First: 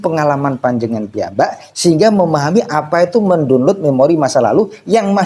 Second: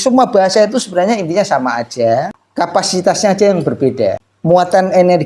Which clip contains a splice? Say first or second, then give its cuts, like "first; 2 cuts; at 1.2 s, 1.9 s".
second; 2 cuts; at 2.4 s, 4.3 s